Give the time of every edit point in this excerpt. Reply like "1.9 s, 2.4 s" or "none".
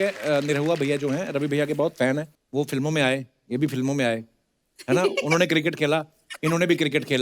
2.4 s